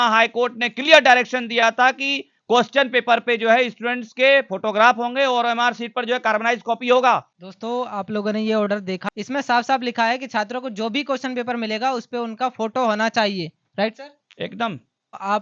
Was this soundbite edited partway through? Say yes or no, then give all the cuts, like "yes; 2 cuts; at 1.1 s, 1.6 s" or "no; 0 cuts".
no; 0 cuts